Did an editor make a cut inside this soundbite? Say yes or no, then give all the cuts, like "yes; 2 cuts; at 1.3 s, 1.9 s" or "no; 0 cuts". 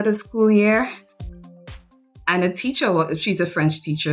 yes; 1 cut; at 1.5 s